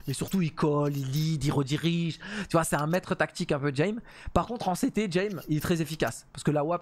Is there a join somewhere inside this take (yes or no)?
no